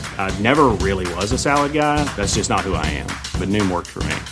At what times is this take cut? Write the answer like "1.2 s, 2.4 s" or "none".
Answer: none